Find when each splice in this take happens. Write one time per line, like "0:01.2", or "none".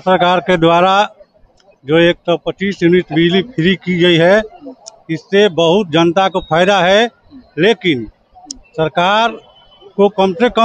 none

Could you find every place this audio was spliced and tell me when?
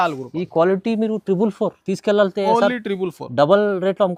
none

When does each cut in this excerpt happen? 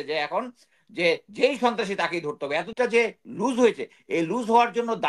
0:02.7

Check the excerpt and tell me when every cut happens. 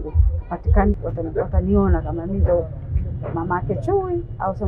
0:01.0

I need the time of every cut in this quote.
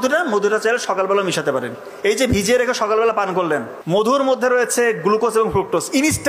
0:04.1

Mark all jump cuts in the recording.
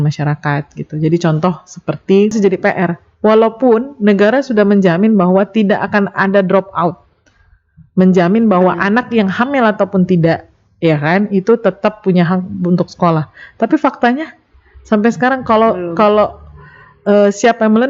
0:02.3

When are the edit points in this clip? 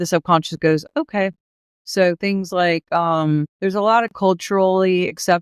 0:03.5

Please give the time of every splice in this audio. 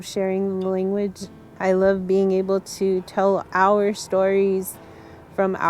0:01.5

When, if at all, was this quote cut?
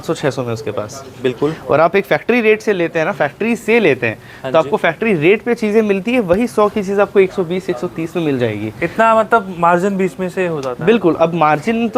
none

